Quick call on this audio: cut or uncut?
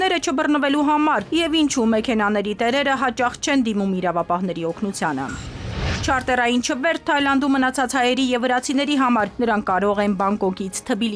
cut